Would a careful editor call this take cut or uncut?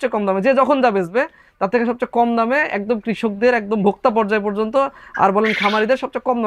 uncut